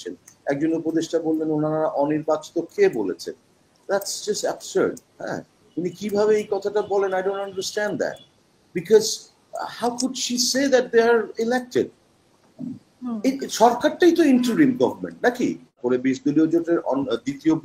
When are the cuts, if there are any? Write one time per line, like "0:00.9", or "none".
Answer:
0:15.8

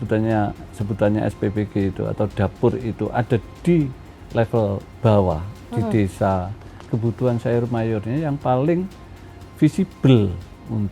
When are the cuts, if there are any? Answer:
0:06.8

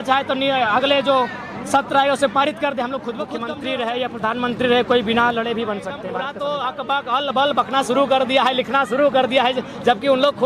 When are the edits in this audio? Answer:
0:03.4
0:06.0

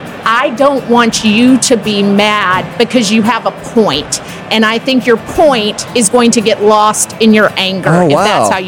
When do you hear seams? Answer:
none

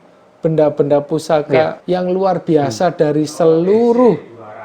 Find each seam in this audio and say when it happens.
0:01.8

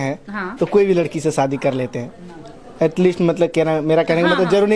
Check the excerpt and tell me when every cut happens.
none

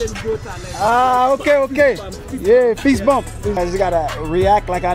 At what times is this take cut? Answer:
0:03.6

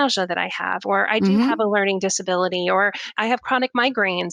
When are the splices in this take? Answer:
0:03.1

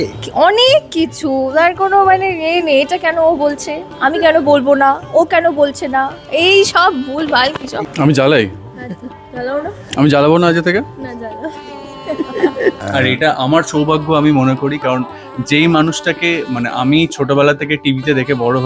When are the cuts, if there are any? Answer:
0:07.8
0:12.8

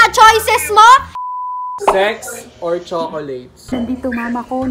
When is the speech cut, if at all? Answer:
0:01.2
0:03.6

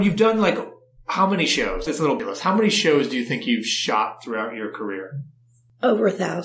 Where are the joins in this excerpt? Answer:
0:01.9

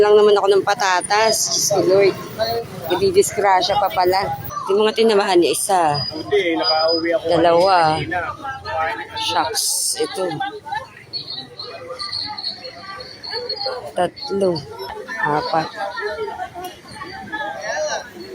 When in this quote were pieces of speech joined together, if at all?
0:04.5
0:14.9

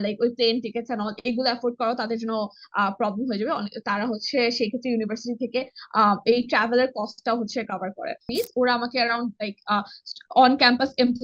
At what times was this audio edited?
0:08.3

